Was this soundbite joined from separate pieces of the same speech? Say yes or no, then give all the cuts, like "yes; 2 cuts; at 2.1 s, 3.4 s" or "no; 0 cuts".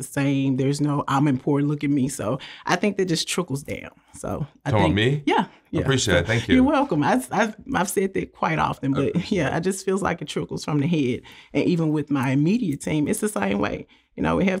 no; 0 cuts